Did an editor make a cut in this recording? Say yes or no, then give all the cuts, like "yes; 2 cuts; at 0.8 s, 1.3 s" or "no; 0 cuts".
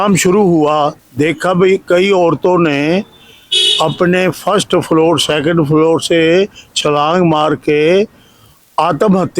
yes; 1 cut; at 1.0 s